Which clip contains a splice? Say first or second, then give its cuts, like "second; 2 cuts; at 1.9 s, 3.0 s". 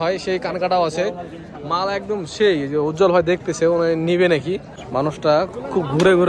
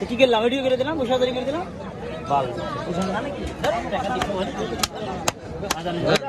first; 1 cut; at 4.7 s